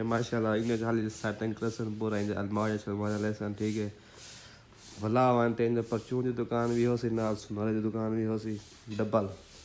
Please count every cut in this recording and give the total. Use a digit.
0